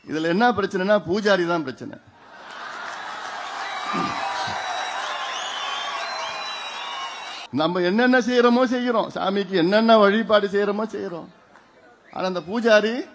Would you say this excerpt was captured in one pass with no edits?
no; 1 cut; at 7.4 s

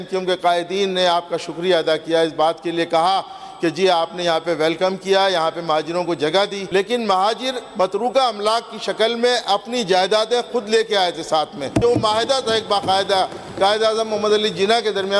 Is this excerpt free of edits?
no; 2 cuts; at 6.6 s, 11.8 s

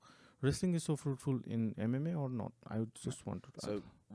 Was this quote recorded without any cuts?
yes; 0 cuts

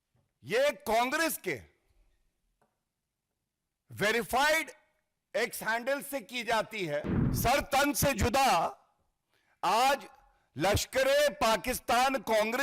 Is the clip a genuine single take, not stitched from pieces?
no; 1 cut; at 7.2 s

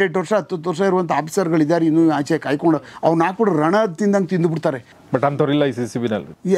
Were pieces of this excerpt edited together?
yes; 1 cut; at 4.9 s

